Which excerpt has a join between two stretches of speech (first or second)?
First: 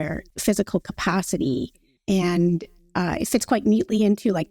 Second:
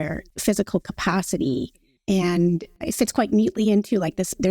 second